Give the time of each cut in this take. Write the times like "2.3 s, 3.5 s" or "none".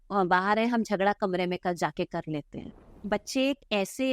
2.9 s